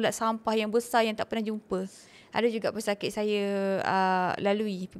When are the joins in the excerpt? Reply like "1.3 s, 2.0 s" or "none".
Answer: none

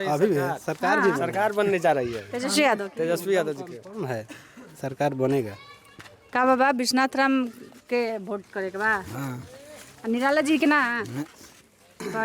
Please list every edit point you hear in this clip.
none

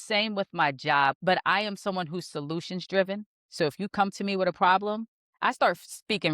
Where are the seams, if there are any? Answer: 1.2 s

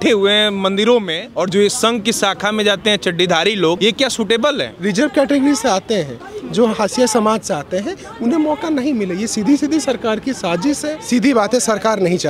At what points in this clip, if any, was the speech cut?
1.2 s, 3.8 s, 4.7 s, 10.9 s

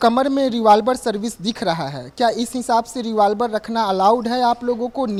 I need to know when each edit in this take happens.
none

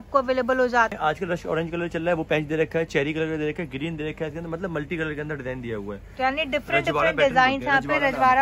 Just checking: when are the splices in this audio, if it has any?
0.9 s

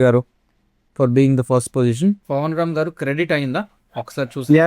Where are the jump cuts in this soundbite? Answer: 2.2 s

